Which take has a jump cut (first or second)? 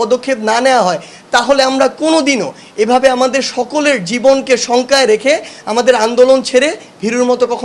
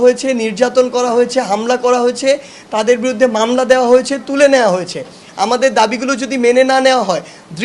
second